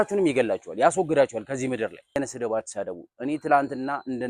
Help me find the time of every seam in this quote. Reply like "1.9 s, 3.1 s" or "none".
2.2 s